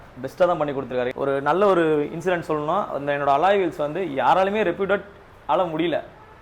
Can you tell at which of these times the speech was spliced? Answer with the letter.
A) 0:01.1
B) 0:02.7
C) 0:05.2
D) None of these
A